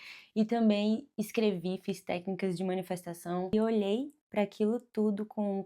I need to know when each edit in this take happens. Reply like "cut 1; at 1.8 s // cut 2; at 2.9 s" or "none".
cut 1; at 3.5 s